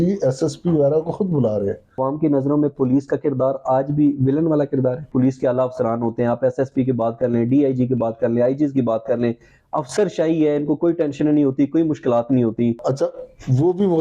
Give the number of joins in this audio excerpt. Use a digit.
3